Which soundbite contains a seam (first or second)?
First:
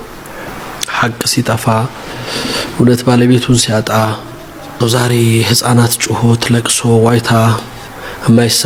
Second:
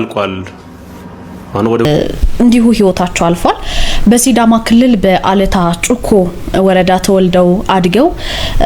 second